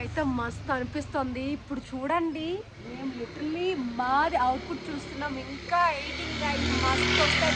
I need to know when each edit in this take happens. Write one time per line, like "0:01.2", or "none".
none